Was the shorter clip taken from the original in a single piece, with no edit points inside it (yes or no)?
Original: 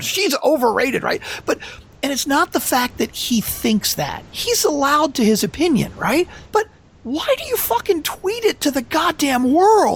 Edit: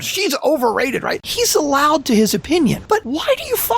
no